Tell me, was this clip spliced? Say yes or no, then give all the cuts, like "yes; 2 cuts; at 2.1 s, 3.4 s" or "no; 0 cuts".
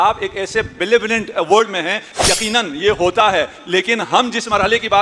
yes; 1 cut; at 2.1 s